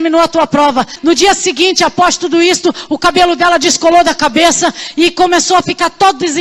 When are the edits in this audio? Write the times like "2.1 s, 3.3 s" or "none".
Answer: 0.9 s